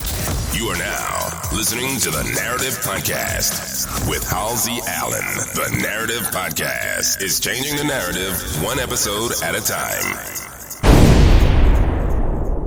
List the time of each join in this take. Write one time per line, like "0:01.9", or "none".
none